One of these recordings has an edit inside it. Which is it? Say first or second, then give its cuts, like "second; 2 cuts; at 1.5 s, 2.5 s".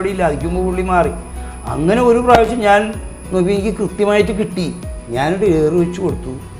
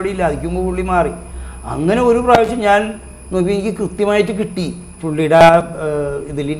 first; 1 cut; at 4.9 s